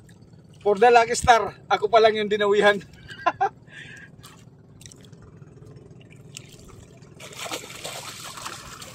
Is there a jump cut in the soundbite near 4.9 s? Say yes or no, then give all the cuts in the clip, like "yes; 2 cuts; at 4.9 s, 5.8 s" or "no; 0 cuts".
yes; 1 cut; at 4.9 s